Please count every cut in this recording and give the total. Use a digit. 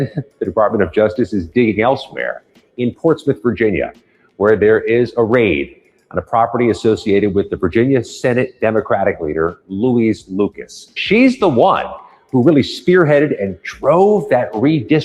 1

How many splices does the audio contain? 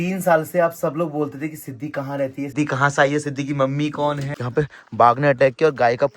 2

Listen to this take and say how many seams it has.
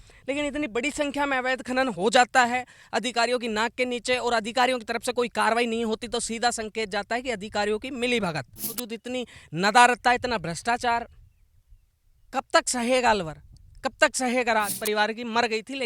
2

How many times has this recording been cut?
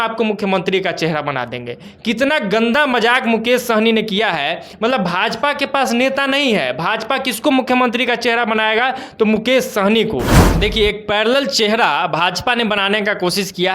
1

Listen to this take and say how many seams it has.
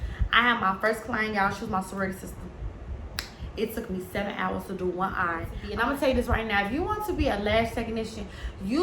1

